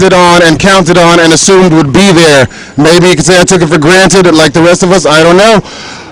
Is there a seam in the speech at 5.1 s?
yes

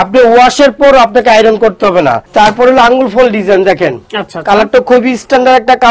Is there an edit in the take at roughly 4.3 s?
no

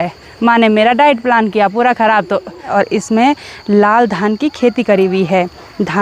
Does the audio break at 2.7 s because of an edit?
yes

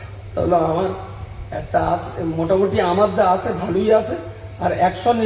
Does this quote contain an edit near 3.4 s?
no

